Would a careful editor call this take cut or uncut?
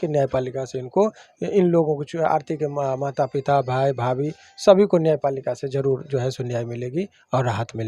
uncut